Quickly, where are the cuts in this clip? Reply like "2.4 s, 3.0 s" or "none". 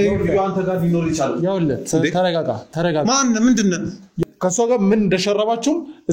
4.2 s